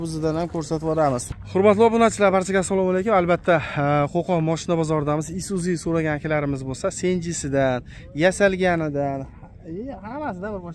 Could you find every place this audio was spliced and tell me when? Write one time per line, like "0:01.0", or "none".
0:01.4